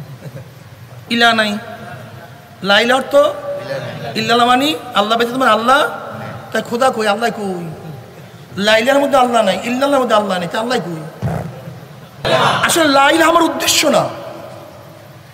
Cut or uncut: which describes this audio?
cut